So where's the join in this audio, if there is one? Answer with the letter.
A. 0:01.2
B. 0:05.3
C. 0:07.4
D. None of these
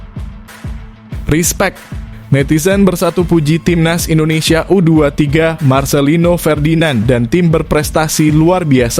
A